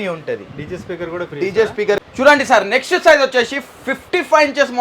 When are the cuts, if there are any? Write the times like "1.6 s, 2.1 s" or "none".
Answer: 2.0 s